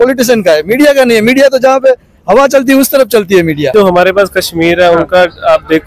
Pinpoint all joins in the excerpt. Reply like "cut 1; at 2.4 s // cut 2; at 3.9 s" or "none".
cut 1; at 3.7 s